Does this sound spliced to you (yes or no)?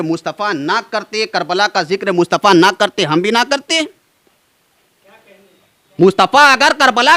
no